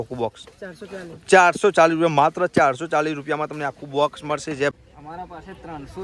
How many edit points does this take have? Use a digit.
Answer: 1